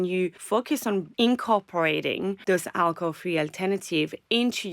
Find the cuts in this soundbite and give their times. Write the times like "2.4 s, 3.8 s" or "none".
1.0 s, 2.4 s